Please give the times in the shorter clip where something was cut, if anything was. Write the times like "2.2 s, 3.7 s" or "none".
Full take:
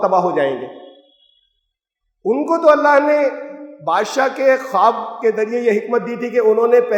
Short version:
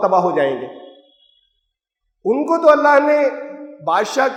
none